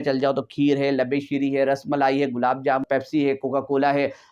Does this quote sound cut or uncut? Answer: cut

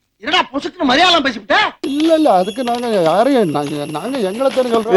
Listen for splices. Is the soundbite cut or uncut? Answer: uncut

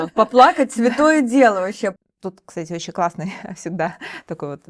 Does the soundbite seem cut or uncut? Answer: cut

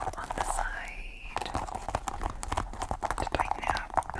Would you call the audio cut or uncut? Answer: uncut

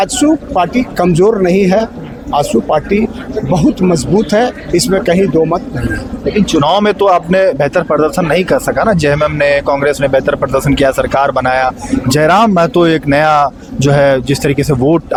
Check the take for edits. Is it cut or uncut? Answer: uncut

